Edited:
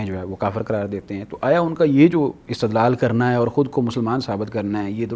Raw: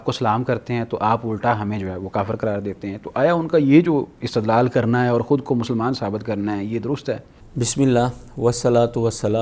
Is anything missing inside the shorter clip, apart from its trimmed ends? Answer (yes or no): no